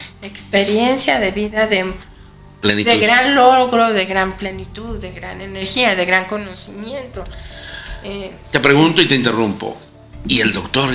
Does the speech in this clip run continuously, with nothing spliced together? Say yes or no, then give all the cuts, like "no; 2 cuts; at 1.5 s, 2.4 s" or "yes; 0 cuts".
yes; 0 cuts